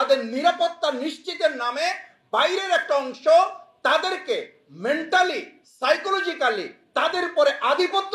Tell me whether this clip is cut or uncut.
uncut